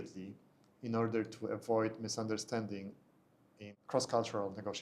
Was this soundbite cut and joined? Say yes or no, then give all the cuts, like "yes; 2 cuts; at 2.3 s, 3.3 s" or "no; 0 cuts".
yes; 1 cut; at 3.8 s